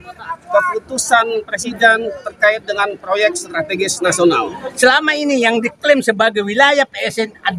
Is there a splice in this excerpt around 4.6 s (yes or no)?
yes